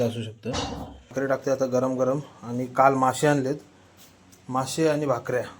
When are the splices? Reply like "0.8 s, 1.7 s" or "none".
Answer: 1.1 s